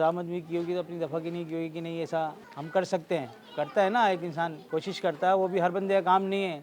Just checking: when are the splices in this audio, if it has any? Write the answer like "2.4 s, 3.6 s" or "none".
none